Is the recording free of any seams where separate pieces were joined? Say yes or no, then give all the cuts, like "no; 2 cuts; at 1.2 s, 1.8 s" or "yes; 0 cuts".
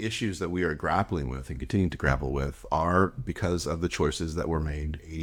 yes; 0 cuts